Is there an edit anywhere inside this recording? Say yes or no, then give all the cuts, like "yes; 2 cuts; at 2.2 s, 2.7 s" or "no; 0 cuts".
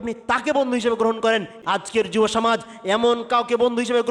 yes; 1 cut; at 1.5 s